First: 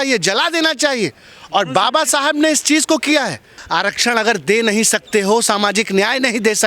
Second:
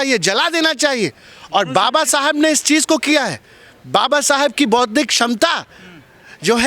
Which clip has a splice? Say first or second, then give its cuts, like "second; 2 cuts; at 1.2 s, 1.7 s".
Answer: first; 1 cut; at 3.6 s